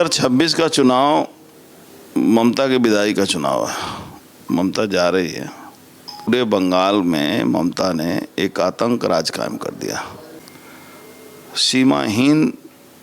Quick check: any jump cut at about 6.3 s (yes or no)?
yes